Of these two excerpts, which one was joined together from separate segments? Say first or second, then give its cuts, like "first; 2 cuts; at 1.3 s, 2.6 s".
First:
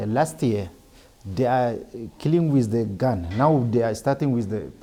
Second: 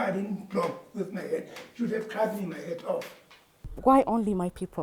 second; 1 cut; at 3.7 s